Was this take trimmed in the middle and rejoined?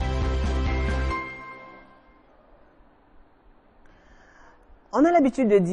yes; 1 cut; at 1.7 s

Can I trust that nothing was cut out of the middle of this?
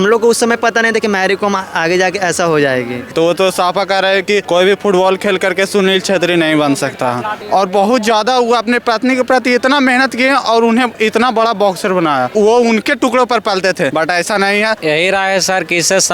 no; 6 cuts; at 3.1 s, 4.4 s, 7.4 s, 12.3 s, 13.9 s, 14.8 s

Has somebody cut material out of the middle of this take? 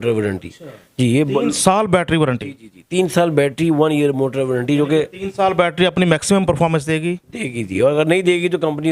no; 0 cuts

